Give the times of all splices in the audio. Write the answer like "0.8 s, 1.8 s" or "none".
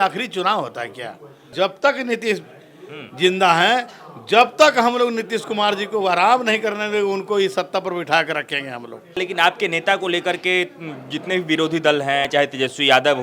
1.5 s, 9.2 s, 12.3 s